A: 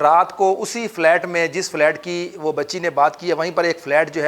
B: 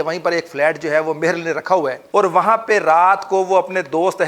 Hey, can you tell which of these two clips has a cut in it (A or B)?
B